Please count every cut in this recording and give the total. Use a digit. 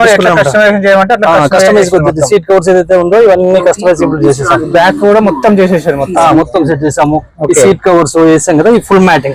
0